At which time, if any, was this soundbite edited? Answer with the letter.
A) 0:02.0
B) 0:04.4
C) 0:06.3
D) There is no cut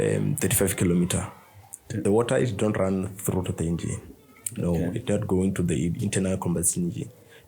A